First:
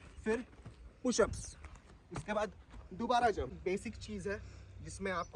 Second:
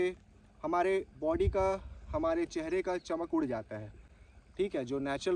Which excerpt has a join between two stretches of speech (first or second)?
first